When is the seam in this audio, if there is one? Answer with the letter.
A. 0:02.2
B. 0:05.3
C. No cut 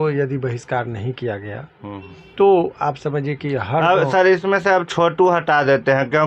A